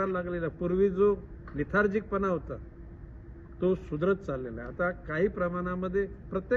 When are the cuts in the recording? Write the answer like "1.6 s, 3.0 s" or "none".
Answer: none